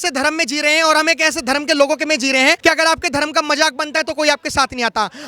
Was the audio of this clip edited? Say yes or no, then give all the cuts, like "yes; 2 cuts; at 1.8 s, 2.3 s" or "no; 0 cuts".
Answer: yes; 1 cut; at 2.6 s